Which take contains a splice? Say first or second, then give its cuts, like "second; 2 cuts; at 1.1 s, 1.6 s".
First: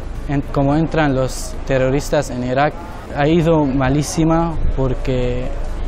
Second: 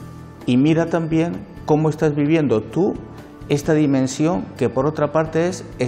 first; 2 cuts; at 1.5 s, 3.1 s